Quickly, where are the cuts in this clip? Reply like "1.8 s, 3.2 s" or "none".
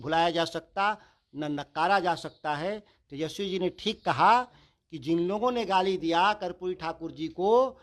none